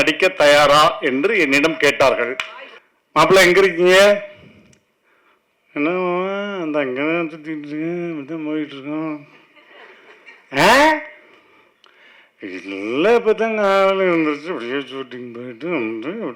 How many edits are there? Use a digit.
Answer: 1